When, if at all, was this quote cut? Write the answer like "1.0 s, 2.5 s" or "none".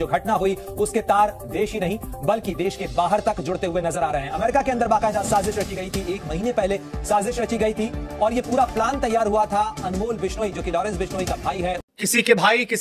11.9 s